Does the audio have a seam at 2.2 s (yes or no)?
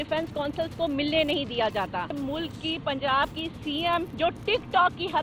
yes